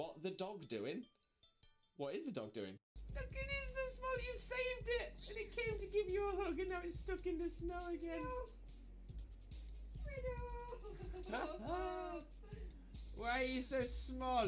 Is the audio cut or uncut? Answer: cut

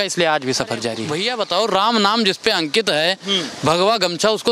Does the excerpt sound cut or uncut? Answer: cut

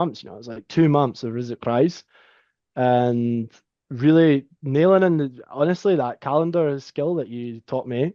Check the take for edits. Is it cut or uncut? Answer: uncut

